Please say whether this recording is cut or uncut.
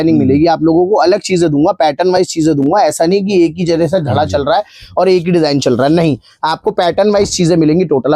uncut